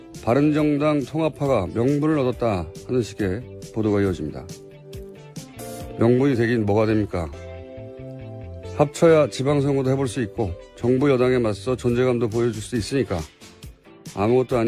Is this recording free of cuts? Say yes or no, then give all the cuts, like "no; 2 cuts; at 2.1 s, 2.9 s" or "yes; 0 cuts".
yes; 0 cuts